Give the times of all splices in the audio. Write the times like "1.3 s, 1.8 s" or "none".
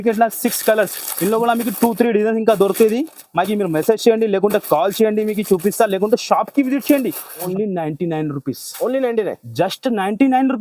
7.3 s